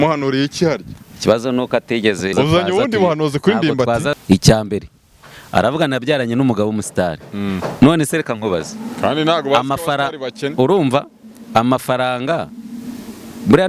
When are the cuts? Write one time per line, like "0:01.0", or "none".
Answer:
0:02.3
0:04.2